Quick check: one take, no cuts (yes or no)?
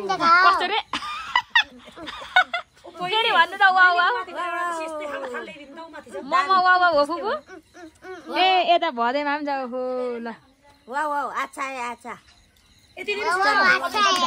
yes